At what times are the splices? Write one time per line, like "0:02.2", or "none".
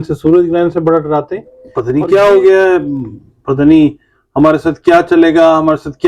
0:01.7